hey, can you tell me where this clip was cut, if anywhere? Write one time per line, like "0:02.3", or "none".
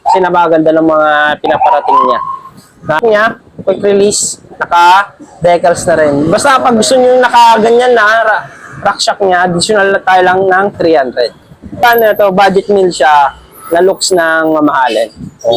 0:03.0
0:11.8